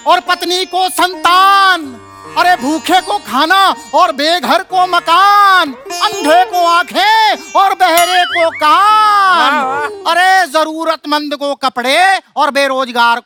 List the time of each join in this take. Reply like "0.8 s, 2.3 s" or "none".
none